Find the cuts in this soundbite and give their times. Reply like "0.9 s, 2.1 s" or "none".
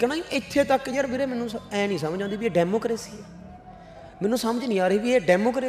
none